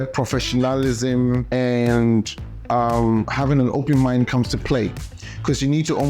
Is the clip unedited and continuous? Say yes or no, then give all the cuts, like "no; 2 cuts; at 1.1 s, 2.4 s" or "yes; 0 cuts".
no; 2 cuts; at 1.5 s, 3.3 s